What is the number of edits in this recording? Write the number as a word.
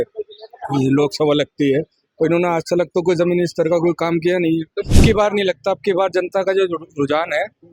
one